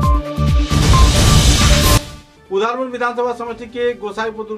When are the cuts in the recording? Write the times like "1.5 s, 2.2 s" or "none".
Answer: 2.0 s